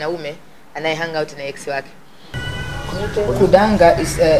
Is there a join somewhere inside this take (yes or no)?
yes